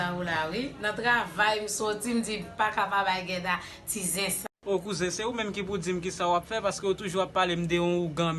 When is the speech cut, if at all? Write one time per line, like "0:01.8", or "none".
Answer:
0:04.4